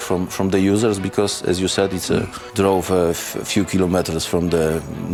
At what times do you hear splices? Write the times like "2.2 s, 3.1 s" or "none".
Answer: none